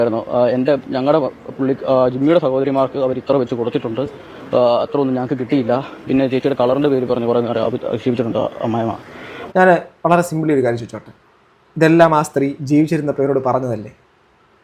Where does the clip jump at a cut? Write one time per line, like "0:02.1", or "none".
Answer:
none

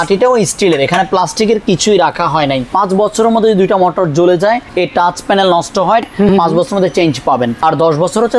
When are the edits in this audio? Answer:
0:02.7
0:04.7
0:06.1
0:07.6

